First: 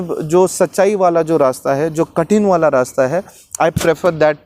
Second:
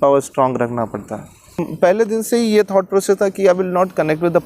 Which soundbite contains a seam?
second; 1 cut; at 1.7 s

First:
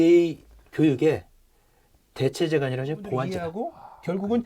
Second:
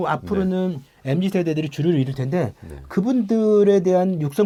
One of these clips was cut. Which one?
first; 1 cut; at 3.5 s

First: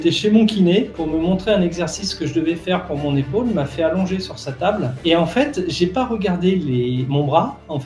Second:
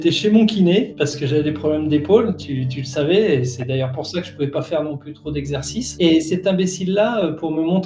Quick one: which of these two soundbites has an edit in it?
first; 2 cuts; at 0.9 s, 5.0 s

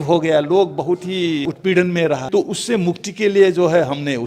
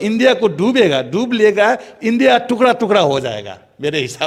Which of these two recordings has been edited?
first; 2 cuts; at 1.4 s, 2.2 s

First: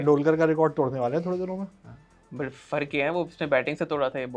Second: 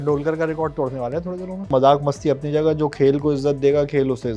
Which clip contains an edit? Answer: second; 1 cut; at 1.7 s

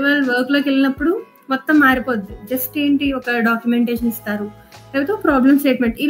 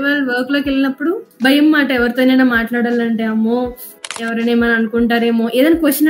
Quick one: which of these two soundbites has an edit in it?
second; 1 cut; at 1.3 s

